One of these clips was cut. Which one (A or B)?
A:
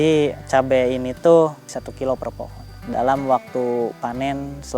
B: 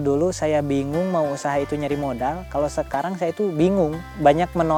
A